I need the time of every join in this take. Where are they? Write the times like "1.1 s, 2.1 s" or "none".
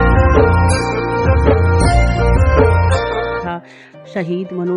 3.4 s